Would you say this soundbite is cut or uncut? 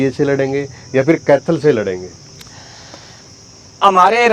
uncut